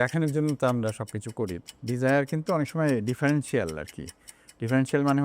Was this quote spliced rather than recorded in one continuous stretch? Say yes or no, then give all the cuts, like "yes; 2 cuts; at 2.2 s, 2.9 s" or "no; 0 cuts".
yes; 1 cut; at 1.6 s